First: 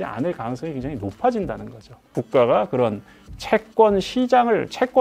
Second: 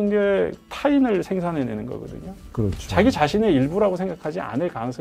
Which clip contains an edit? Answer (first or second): first